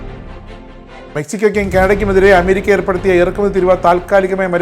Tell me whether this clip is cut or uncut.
cut